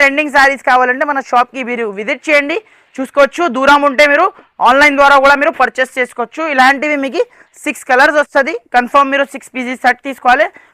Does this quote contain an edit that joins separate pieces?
no; 0 cuts

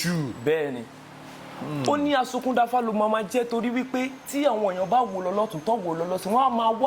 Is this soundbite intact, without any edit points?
yes; 0 cuts

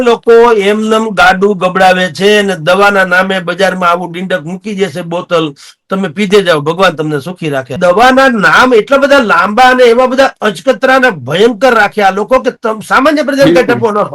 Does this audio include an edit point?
yes; 1 cut; at 7.7 s

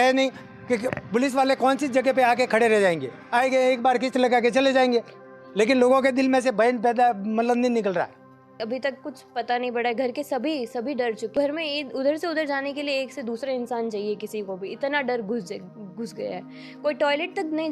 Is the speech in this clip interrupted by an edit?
yes; 2 cuts; at 8.5 s, 11.3 s

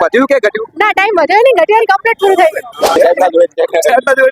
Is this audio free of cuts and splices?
no; 1 cut; at 3.0 s

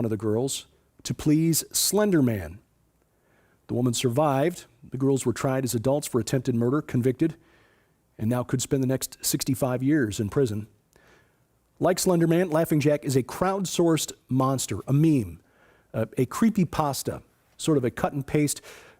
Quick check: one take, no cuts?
no; 1 cut; at 12.0 s

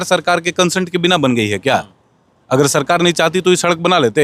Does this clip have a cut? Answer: no; 0 cuts

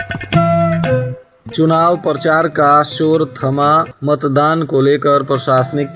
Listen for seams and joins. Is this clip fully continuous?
no; 1 cut; at 1.2 s

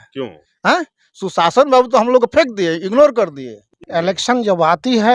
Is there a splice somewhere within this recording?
yes; 1 cut; at 3.8 s

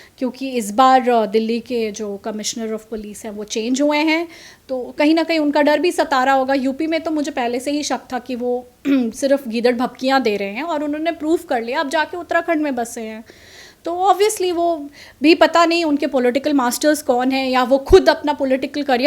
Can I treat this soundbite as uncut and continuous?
yes; 0 cuts

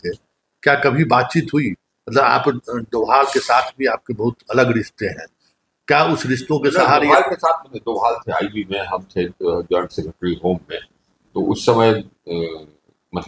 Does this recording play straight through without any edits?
yes; 0 cuts

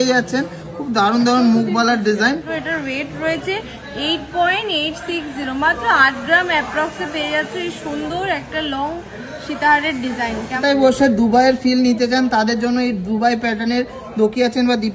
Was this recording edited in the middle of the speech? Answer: yes; 2 cuts; at 2.4 s, 10.5 s

